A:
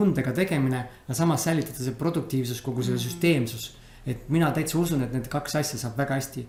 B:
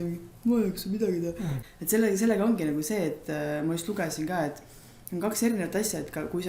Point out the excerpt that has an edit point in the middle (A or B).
B